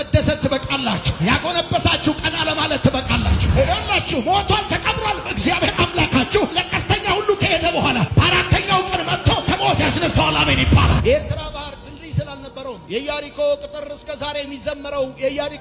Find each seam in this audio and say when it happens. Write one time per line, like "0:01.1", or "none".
0:03.4
0:10.9